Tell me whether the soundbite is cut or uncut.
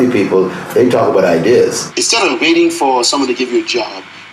cut